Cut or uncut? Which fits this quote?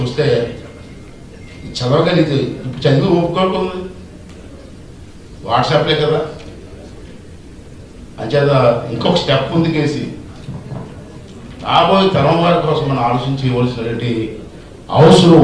cut